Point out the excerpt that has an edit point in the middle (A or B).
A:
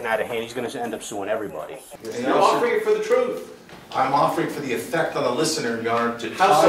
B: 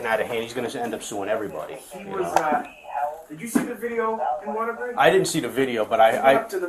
A